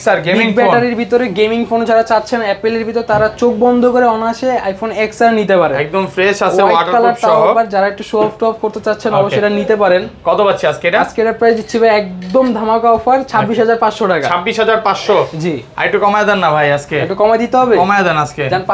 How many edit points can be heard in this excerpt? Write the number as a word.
zero